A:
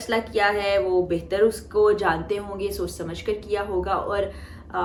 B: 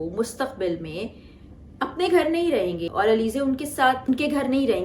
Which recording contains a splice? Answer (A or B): B